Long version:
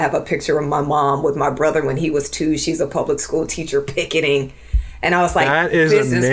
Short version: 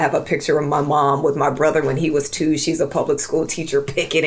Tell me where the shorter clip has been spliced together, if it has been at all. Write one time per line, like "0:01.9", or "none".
none